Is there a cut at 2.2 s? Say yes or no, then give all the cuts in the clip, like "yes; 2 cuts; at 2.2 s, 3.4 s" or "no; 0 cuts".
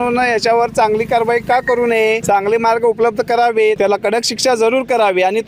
yes; 2 cuts; at 2.2 s, 3.8 s